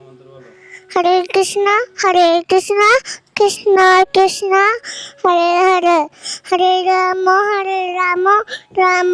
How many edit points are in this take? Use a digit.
0